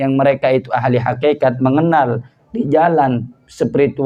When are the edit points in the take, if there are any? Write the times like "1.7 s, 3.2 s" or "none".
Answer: none